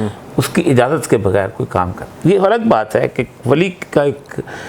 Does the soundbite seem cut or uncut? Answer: uncut